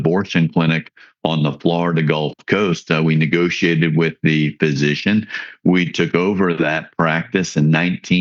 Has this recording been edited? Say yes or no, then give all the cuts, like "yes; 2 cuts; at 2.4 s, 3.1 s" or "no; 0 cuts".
no; 0 cuts